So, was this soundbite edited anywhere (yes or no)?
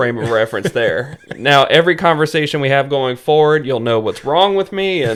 no